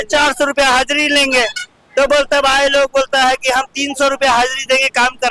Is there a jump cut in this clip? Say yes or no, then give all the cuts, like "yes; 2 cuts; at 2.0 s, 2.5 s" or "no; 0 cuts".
no; 0 cuts